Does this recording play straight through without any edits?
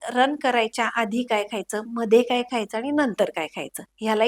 yes; 0 cuts

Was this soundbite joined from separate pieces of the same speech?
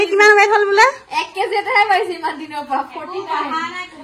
no; 0 cuts

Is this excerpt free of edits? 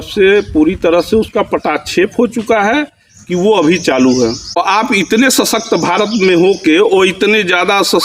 no; 1 cut; at 4.5 s

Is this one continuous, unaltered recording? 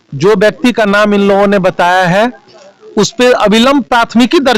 yes; 0 cuts

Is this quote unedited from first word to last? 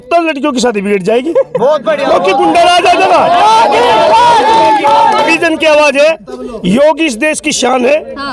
no; 1 cut; at 5.3 s

